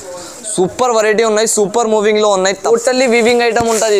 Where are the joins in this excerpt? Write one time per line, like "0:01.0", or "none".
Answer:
0:02.7